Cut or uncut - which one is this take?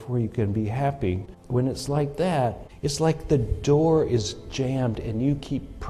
cut